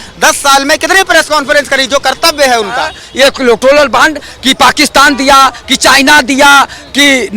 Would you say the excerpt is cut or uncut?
cut